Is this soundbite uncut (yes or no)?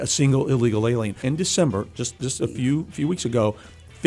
no